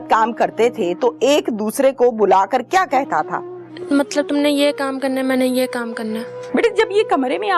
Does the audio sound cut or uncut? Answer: cut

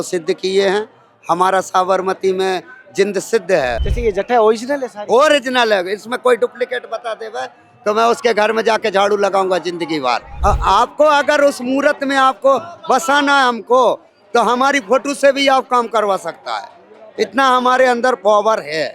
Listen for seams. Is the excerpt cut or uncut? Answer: cut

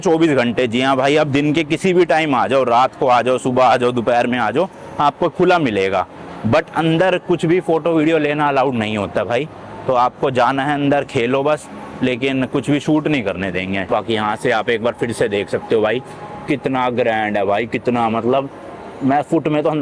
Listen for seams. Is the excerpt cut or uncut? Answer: uncut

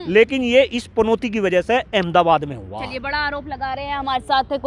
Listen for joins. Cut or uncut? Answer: uncut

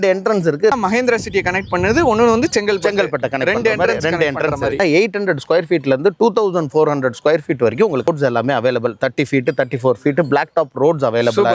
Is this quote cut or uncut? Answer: cut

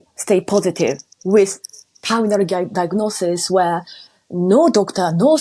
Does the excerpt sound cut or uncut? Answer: uncut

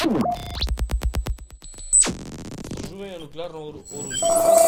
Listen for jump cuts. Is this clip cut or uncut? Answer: uncut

